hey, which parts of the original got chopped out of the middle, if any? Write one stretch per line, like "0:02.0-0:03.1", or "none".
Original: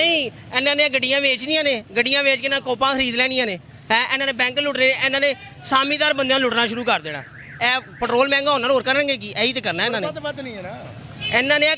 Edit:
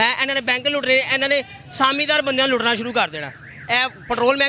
none